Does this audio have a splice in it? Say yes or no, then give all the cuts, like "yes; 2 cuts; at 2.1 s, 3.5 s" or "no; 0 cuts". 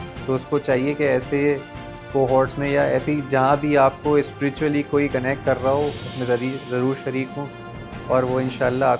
no; 0 cuts